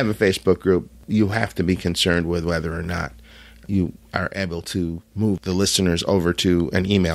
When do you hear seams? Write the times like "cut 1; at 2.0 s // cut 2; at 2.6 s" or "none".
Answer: none